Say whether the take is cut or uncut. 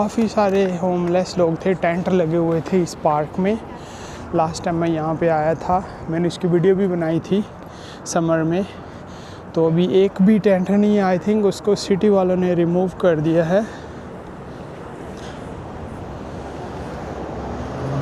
uncut